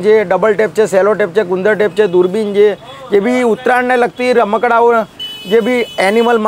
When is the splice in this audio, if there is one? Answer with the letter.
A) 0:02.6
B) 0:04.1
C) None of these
C